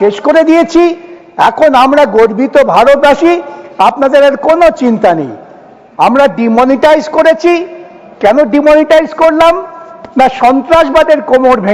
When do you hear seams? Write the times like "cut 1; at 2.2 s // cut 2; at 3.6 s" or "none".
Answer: none